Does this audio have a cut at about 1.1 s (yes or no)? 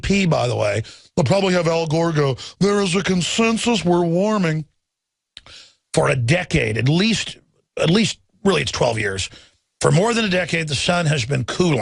yes